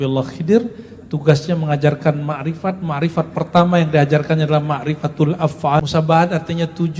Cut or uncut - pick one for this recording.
cut